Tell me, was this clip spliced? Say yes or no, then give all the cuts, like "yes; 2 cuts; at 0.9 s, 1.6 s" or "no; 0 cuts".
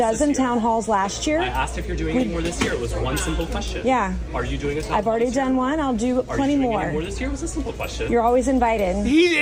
no; 0 cuts